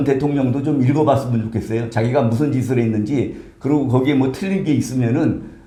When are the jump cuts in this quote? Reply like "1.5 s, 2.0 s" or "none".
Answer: none